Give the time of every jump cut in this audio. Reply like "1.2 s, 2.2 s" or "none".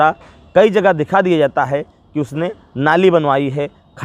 none